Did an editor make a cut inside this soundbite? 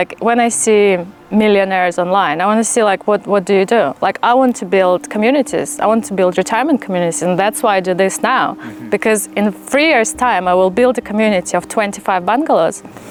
no; 0 cuts

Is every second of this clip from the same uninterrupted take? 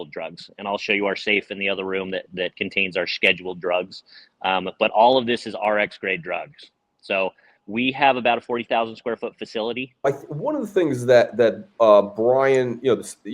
no; 1 cut; at 10.1 s

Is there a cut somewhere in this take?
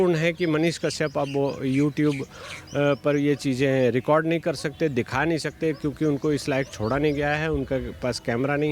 no; 0 cuts

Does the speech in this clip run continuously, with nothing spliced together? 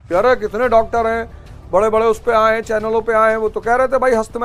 yes; 0 cuts

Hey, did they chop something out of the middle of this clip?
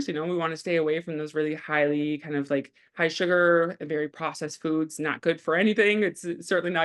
no; 0 cuts

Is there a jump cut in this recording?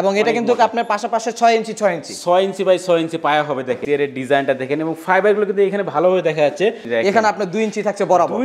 yes; 2 cuts; at 3.8 s, 6.8 s

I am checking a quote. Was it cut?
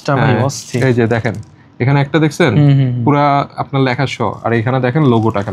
no; 0 cuts

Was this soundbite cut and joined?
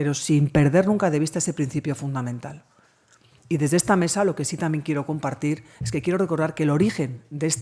no; 0 cuts

